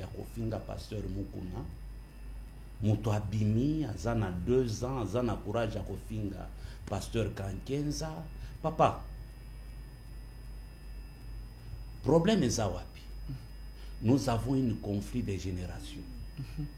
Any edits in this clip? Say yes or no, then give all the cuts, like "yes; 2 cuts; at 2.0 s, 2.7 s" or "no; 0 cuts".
no; 0 cuts